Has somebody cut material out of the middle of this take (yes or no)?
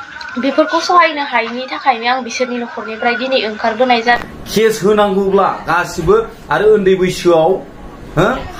yes